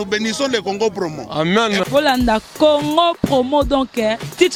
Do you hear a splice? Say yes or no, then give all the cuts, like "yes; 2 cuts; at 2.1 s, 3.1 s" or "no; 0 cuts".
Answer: no; 0 cuts